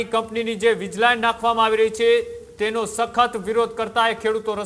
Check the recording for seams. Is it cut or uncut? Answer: uncut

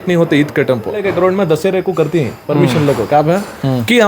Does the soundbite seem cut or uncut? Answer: cut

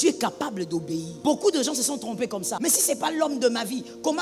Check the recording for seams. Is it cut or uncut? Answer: cut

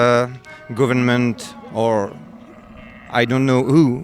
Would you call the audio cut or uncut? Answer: uncut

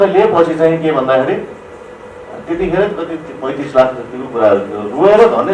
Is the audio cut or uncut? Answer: uncut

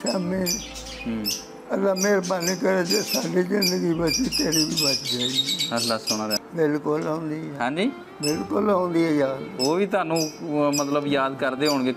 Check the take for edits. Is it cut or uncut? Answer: cut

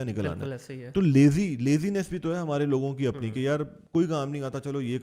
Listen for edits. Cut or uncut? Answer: uncut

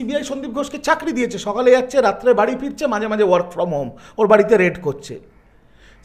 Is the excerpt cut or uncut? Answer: uncut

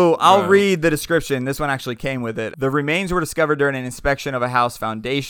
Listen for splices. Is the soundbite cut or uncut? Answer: cut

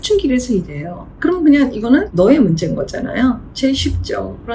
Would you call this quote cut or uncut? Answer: cut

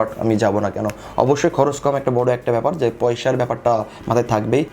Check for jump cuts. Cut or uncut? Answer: uncut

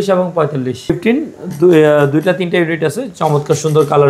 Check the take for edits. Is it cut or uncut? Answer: cut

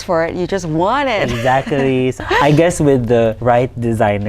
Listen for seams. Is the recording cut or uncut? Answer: cut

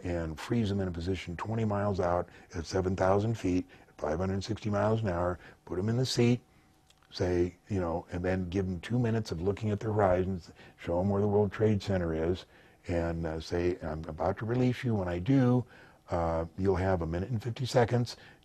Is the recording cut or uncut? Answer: uncut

